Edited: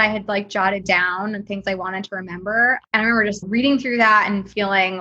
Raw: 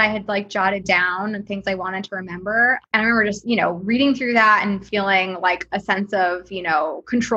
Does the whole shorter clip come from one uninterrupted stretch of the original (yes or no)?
no